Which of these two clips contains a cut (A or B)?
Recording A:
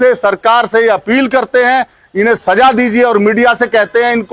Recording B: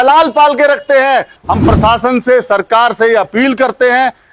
B